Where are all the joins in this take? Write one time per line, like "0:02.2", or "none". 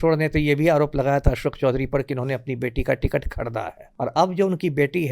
0:03.8